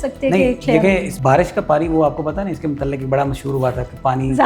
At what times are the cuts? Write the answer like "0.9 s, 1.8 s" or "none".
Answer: 1.1 s